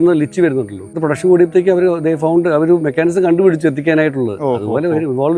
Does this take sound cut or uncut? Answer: cut